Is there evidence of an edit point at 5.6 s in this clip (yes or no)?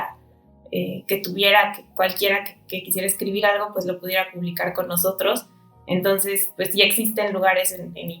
no